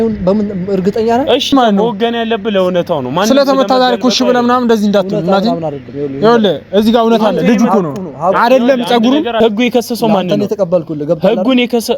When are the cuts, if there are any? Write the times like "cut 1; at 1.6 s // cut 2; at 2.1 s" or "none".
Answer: cut 1; at 1.5 s // cut 2; at 9.4 s